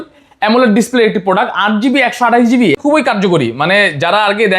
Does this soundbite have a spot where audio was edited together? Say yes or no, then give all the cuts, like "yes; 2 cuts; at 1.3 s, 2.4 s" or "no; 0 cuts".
yes; 1 cut; at 2.8 s